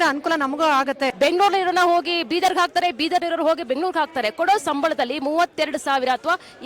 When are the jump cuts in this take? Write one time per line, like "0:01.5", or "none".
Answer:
0:01.1